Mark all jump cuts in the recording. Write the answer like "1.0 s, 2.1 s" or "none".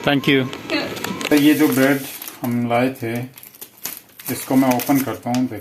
1.3 s